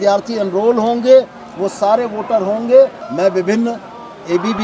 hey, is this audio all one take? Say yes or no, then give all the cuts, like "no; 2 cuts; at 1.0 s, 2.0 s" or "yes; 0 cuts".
no; 1 cut; at 3.0 s